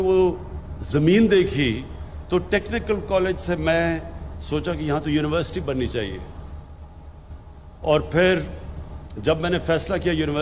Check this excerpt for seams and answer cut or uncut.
uncut